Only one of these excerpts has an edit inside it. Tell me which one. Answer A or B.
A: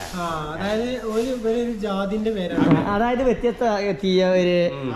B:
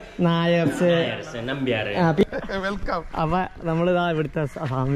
B